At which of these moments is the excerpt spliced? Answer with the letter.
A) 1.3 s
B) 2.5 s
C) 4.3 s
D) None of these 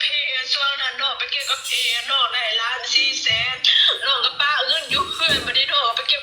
D